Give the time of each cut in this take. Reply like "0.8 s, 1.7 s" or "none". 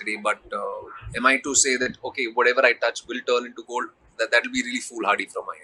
none